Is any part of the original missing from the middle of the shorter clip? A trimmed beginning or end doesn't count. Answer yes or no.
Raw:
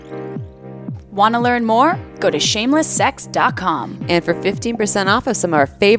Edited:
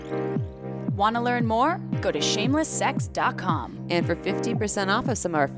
yes